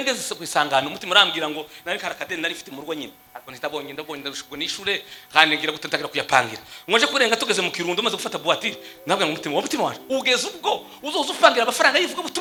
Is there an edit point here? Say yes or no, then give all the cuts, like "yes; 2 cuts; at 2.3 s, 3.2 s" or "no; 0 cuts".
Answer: no; 0 cuts